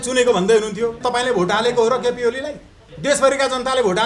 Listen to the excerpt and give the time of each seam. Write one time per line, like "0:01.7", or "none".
0:01.0